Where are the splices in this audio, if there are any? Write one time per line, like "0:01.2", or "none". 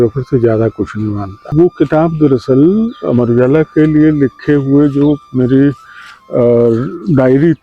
0:01.4